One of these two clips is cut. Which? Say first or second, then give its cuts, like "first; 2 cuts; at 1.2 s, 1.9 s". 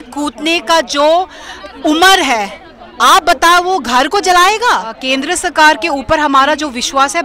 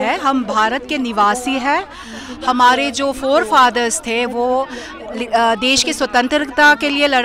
first; 1 cut; at 4.9 s